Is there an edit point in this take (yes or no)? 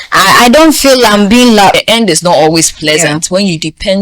yes